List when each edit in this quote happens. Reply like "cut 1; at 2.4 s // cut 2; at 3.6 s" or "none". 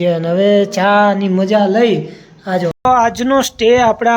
cut 1; at 2.8 s